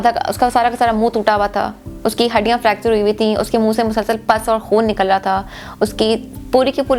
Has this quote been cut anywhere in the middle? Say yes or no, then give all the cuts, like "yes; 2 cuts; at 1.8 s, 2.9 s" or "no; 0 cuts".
no; 0 cuts